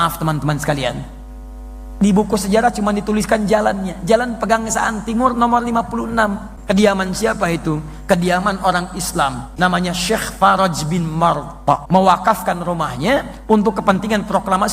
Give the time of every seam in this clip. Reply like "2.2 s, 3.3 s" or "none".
6.5 s, 9.4 s, 11.8 s